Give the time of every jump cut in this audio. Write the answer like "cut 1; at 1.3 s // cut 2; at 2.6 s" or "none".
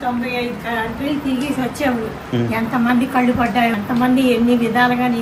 cut 1; at 3.7 s